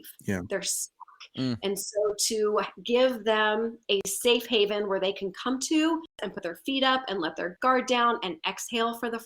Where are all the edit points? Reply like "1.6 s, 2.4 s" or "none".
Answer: 6.2 s